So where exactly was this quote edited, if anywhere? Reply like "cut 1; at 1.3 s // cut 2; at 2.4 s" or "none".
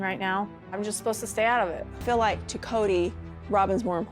cut 1; at 2.0 s